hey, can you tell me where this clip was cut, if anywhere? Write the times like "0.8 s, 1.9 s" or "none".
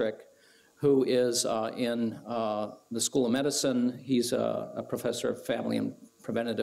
2.2 s